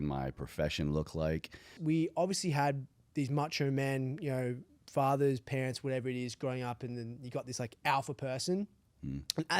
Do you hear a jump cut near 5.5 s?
no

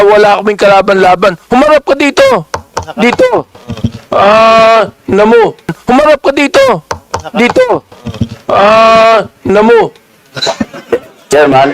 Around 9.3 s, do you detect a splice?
no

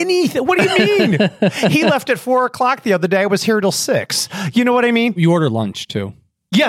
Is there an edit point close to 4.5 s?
no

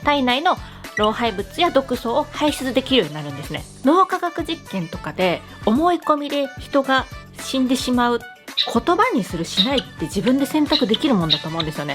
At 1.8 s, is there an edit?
no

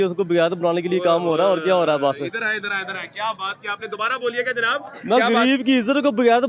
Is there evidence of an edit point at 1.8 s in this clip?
no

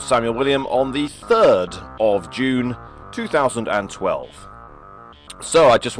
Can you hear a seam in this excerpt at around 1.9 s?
yes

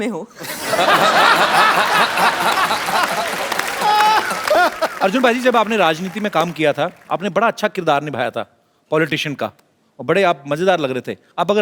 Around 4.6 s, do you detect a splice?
yes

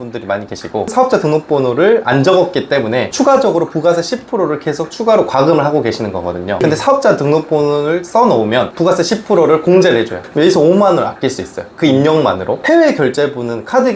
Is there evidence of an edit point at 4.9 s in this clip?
no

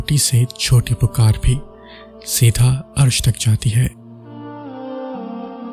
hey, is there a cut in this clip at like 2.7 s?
no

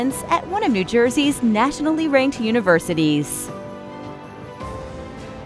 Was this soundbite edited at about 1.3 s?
no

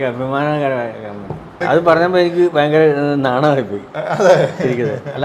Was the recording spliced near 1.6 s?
yes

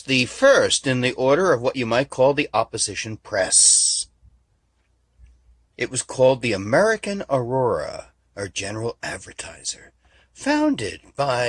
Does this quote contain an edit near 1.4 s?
yes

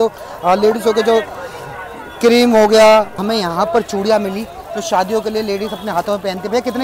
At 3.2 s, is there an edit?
yes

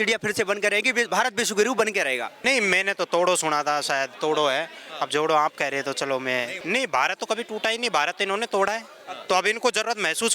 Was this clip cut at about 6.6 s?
yes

